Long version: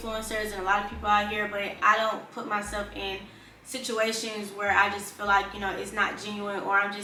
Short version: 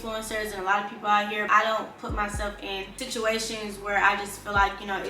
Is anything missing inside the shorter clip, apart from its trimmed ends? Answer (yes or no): yes